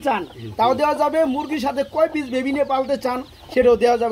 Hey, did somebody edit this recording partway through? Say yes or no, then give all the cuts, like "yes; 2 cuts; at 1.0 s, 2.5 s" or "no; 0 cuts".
no; 0 cuts